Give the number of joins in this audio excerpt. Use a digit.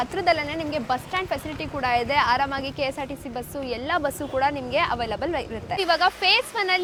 0